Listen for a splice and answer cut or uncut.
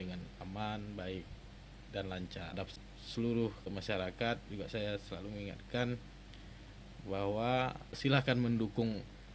cut